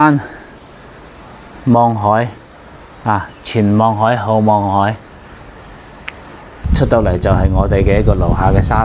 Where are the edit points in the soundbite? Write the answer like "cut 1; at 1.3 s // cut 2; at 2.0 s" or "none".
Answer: cut 1; at 6.6 s

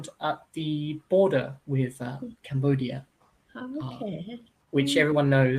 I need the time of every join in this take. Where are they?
none

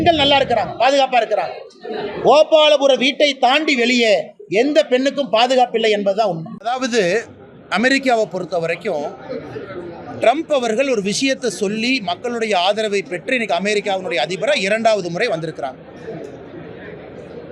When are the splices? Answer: none

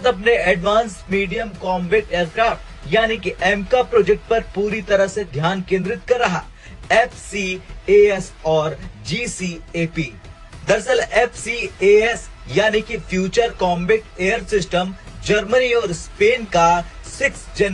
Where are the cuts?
cut 1; at 6.7 s

